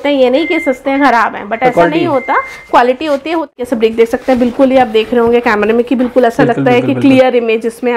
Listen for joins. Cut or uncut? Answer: cut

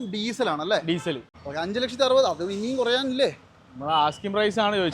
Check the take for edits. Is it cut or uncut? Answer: cut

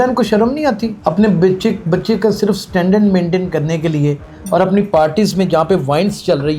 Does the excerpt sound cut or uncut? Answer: cut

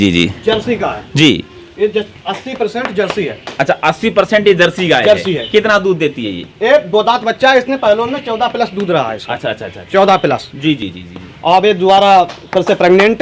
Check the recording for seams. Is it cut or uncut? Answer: uncut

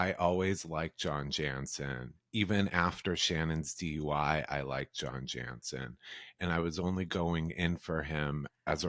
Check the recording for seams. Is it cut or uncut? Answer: uncut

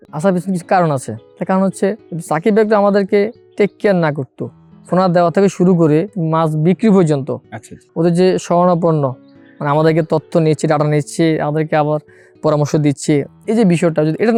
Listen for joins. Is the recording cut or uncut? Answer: uncut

